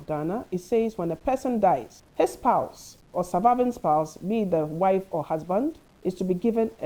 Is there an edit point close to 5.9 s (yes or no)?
yes